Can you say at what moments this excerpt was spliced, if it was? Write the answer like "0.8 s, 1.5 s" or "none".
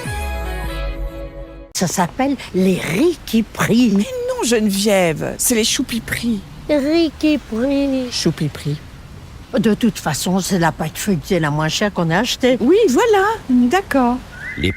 1.6 s